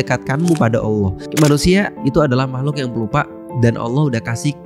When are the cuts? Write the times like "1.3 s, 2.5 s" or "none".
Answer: 1.2 s